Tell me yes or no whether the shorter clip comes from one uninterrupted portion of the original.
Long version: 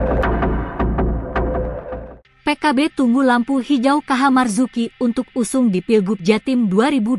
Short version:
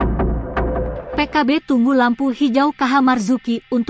no